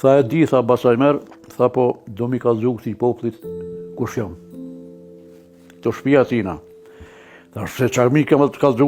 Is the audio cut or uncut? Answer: uncut